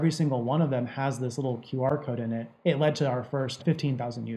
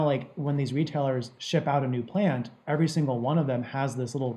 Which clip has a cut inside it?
first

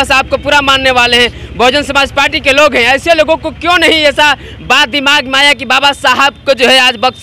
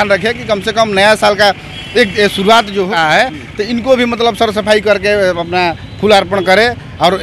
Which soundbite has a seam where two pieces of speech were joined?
second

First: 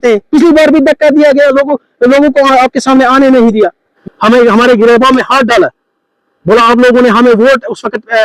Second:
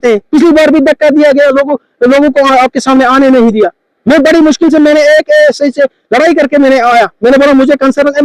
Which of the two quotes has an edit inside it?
first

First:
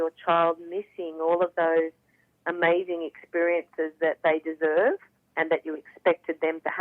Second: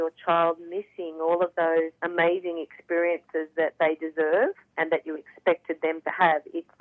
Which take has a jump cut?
second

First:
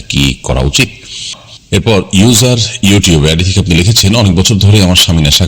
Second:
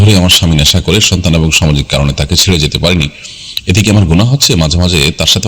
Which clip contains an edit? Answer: first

